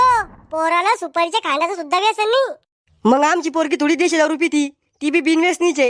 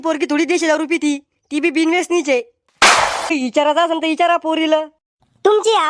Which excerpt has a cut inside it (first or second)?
second